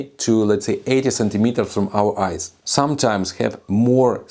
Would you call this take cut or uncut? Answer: cut